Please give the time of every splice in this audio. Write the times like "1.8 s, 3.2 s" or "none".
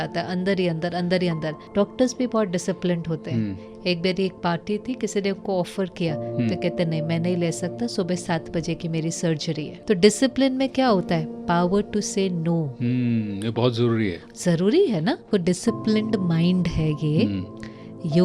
1.6 s, 9.7 s, 15.2 s